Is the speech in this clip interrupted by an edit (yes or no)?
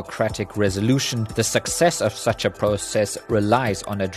yes